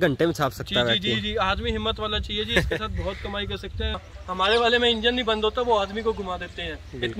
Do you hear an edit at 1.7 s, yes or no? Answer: no